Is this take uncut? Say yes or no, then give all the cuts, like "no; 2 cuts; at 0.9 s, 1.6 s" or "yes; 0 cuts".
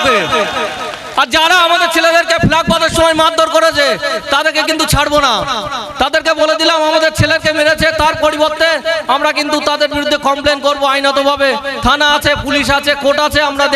yes; 0 cuts